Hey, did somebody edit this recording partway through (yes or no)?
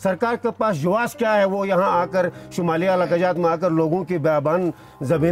no